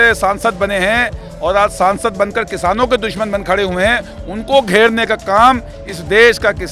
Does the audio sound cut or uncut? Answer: uncut